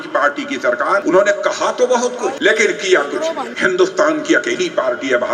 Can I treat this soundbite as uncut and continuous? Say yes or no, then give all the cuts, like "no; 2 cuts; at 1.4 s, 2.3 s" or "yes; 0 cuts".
no; 3 cuts; at 1.0 s, 2.4 s, 3.5 s